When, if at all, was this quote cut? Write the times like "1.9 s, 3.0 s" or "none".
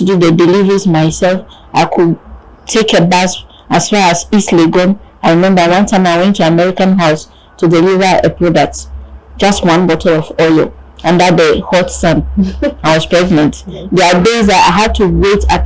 none